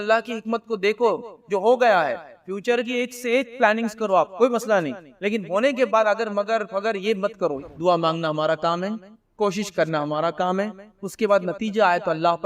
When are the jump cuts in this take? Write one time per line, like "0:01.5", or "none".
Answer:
0:07.6